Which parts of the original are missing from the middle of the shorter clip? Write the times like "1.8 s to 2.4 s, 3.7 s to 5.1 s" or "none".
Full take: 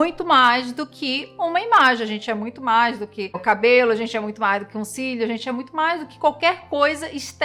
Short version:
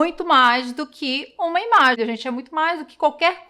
2.0 s to 5.2 s